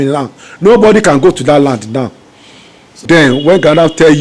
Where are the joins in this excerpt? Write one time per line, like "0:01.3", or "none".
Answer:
0:03.0